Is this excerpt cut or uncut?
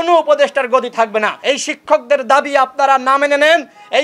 cut